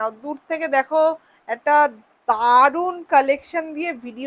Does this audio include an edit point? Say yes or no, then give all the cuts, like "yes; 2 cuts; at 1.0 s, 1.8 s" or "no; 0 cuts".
no; 0 cuts